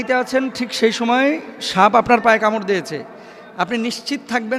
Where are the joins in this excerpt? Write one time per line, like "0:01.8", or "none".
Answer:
none